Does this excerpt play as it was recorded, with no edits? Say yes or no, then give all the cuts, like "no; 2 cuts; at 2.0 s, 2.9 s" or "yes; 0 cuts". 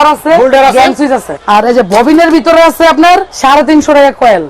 no; 2 cuts; at 1.3 s, 3.3 s